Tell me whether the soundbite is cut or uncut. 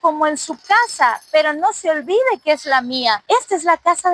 uncut